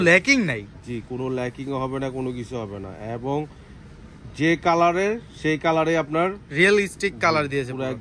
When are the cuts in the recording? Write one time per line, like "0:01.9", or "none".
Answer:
none